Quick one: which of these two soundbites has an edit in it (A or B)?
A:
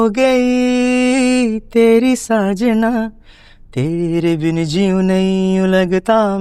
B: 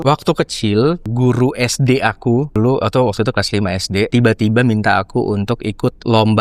B